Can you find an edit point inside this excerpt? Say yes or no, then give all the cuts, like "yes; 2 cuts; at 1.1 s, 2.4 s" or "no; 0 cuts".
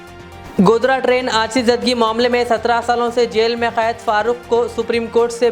no; 0 cuts